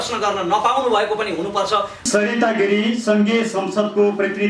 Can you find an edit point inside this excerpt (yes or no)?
yes